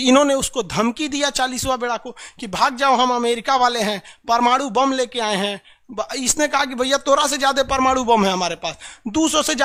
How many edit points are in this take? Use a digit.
0